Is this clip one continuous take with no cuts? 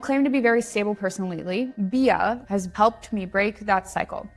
no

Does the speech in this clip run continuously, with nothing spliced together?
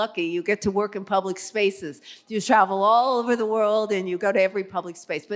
yes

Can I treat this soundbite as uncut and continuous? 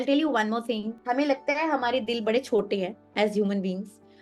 no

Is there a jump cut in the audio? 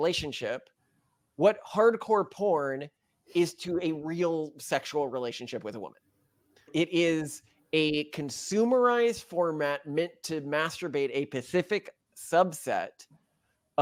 no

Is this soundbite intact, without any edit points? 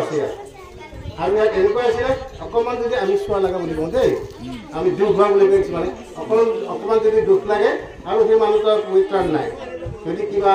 yes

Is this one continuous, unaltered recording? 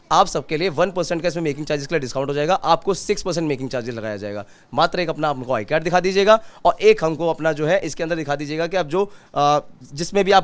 yes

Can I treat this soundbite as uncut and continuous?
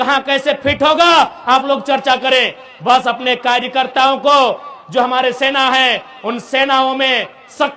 yes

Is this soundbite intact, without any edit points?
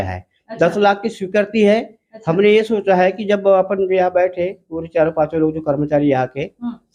yes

